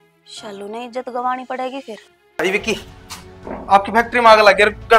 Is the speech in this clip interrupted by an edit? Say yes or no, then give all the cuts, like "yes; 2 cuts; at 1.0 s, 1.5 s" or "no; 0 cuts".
yes; 1 cut; at 2.4 s